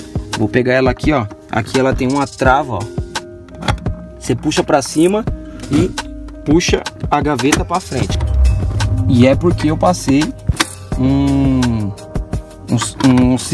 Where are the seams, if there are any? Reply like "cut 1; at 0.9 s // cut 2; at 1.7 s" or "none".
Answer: cut 1; at 8.3 s